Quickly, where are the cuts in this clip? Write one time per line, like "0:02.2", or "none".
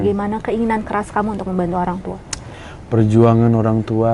none